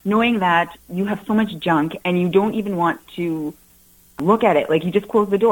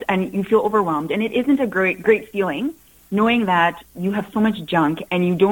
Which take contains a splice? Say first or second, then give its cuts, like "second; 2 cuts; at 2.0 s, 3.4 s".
first; 1 cut; at 4.2 s